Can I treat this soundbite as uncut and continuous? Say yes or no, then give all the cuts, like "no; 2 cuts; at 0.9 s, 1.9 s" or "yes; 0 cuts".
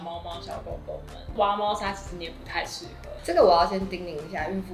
yes; 0 cuts